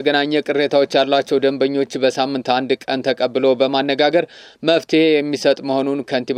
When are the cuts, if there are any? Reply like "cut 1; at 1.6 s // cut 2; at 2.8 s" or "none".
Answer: none